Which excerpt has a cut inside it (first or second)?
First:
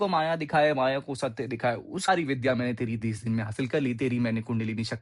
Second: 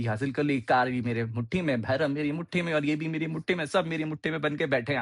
first